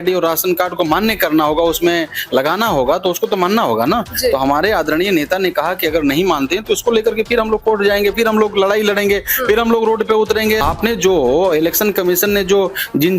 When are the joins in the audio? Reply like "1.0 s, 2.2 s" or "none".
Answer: 10.6 s

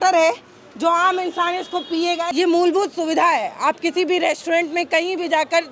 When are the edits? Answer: 2.3 s

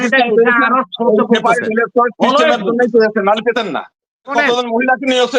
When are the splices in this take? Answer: 4.3 s

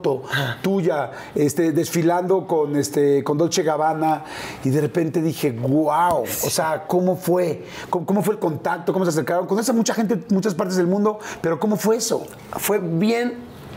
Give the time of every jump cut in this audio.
none

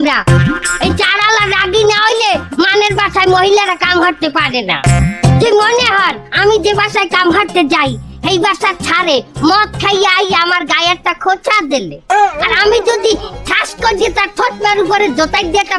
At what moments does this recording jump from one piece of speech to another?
none

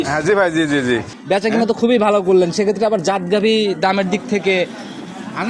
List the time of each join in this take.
1.1 s

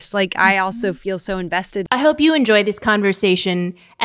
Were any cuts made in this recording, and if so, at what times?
1.9 s

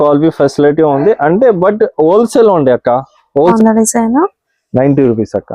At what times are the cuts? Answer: 3.5 s

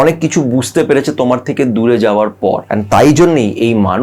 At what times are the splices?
2.7 s

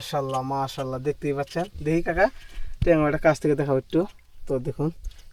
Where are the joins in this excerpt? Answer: none

